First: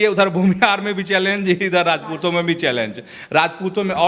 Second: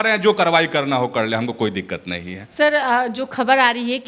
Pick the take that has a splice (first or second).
second